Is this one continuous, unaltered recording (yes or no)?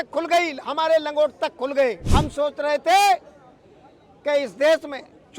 no